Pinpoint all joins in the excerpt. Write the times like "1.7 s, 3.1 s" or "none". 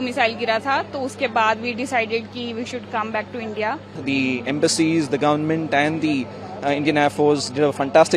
3.9 s